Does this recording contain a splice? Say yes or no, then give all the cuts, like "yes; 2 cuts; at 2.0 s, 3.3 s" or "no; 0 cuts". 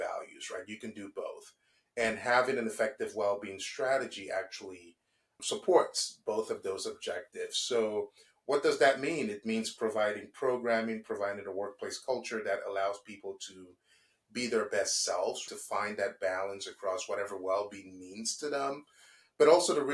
yes; 1 cut; at 15.4 s